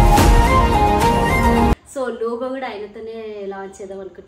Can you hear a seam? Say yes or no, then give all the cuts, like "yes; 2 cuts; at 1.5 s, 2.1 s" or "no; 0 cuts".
yes; 1 cut; at 1.9 s